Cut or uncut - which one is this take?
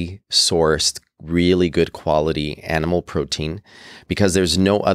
uncut